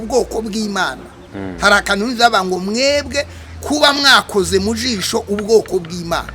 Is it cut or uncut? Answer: uncut